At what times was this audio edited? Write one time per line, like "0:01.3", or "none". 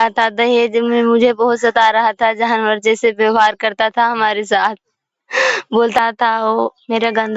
0:06.0